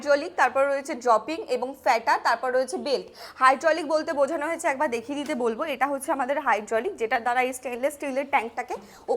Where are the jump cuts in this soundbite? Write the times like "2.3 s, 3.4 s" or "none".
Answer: none